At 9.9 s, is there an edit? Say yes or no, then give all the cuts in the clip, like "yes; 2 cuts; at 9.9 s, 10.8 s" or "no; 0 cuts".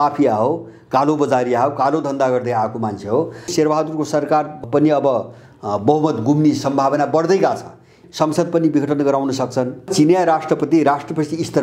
yes; 4 cuts; at 3.5 s, 4.6 s, 8.0 s, 9.9 s